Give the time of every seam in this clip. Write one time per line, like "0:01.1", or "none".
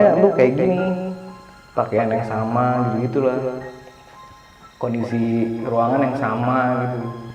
none